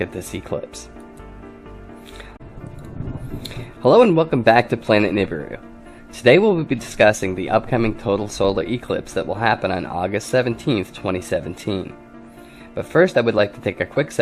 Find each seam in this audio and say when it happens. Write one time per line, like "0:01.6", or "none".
none